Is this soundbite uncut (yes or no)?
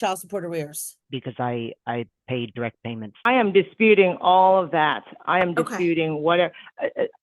no